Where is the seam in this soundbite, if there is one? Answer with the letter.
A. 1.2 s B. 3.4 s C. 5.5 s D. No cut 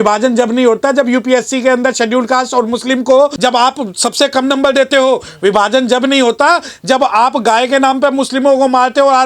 B